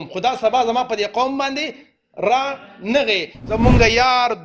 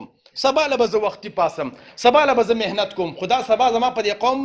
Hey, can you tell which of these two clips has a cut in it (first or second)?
first